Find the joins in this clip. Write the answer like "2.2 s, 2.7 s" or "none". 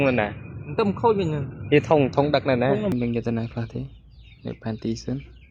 2.9 s